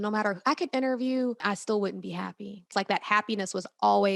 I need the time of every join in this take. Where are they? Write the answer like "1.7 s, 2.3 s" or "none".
1.4 s, 2.7 s